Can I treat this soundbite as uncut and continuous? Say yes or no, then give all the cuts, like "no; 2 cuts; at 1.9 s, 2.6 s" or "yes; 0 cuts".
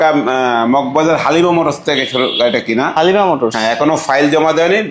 yes; 0 cuts